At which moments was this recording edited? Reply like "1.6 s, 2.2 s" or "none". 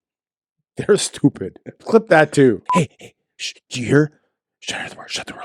2.6 s